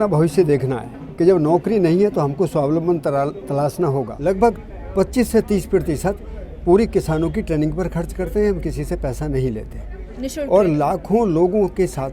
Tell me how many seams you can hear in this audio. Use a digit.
1